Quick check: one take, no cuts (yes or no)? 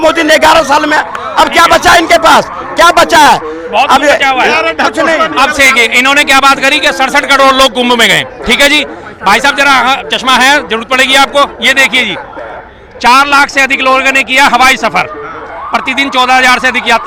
yes